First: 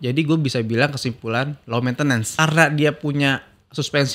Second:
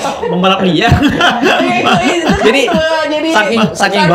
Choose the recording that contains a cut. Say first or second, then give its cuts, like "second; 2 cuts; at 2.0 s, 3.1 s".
first; 1 cut; at 2.3 s